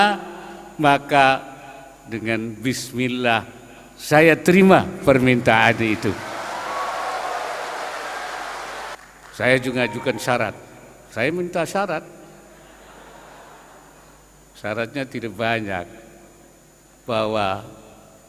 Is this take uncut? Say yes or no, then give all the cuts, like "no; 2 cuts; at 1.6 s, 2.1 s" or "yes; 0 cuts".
no; 1 cut; at 8.9 s